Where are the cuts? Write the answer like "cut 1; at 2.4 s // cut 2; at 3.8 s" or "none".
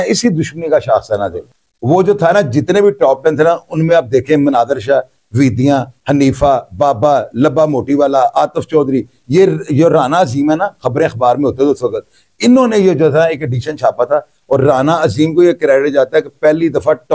none